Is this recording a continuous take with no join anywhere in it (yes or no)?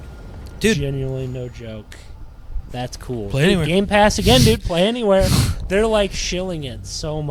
yes